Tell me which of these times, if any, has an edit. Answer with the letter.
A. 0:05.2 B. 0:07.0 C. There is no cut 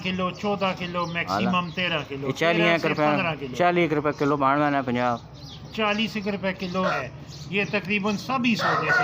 B